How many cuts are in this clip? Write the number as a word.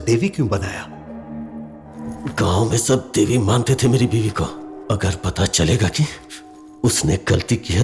one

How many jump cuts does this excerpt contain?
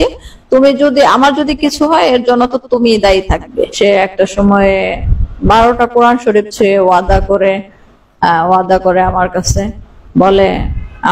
one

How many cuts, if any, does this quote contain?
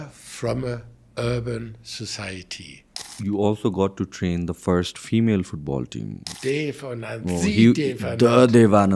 two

